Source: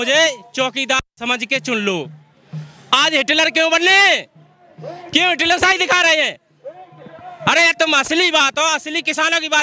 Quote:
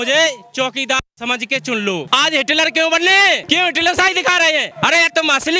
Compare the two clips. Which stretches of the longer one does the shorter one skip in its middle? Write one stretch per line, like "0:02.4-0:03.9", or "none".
0:02.1-0:02.9
0:04.2-0:05.1
0:06.3-0:07.3